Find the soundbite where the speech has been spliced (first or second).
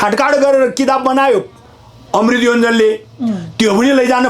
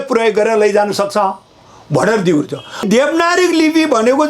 second